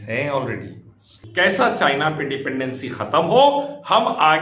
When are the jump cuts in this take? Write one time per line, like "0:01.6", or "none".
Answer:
0:01.2